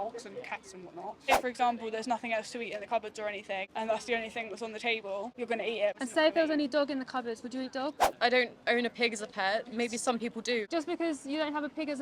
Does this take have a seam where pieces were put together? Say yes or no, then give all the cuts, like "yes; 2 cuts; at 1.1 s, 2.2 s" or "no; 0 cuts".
yes; 5 cuts; at 1.3 s, 3.7 s, 5.8 s, 8.1 s, 10.7 s